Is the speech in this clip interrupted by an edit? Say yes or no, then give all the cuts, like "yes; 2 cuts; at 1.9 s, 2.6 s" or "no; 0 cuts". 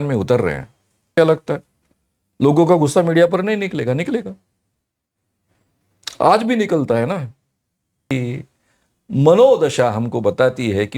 yes; 2 cuts; at 1.1 s, 8.1 s